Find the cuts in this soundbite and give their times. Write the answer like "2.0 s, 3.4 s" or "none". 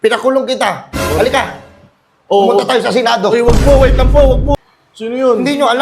4.5 s

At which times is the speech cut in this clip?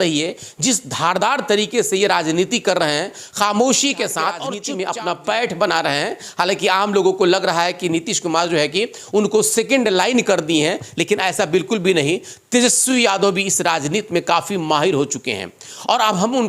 4.6 s

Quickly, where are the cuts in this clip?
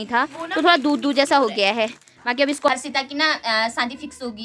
2.7 s

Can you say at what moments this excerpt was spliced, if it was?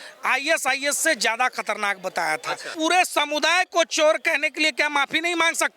2.7 s

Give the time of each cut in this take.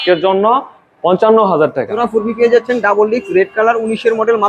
2.0 s

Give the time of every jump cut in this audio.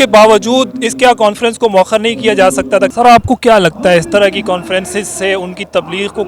2.9 s

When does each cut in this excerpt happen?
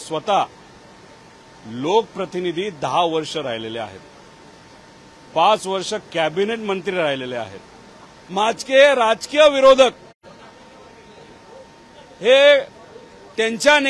8.4 s

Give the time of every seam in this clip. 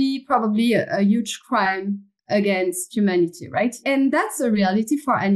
3.8 s

